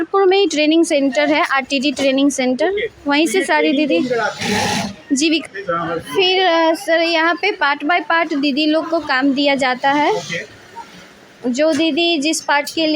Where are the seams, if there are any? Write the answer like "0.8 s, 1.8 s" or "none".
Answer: 5.4 s